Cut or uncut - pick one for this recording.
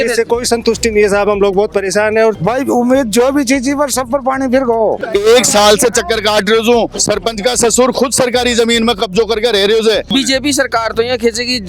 cut